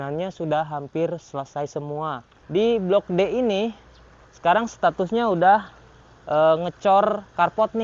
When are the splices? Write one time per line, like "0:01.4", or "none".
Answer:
0:02.3